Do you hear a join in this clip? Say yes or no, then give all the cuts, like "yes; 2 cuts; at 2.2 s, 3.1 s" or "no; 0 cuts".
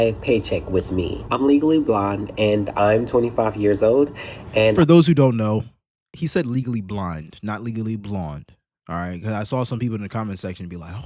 yes; 1 cut; at 1.2 s